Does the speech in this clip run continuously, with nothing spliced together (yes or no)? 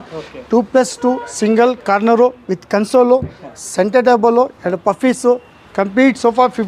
yes